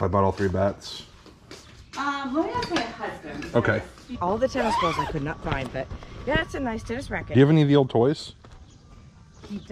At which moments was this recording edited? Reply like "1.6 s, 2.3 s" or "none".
4.2 s, 7.3 s